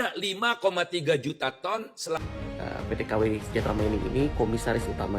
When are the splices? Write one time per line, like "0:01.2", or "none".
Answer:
0:02.2